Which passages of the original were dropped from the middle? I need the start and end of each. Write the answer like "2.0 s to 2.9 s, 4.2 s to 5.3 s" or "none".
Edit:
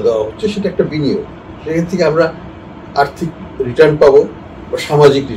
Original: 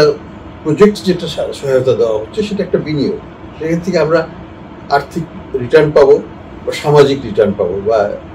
none